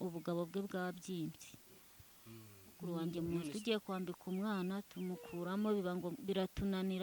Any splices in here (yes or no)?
yes